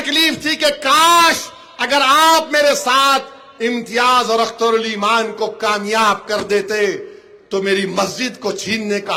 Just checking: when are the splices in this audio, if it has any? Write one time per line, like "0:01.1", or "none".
none